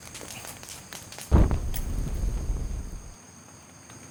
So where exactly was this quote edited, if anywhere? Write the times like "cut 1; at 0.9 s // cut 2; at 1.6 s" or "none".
none